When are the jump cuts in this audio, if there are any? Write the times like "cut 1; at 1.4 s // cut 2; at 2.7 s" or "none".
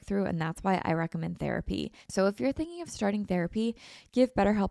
cut 1; at 2.0 s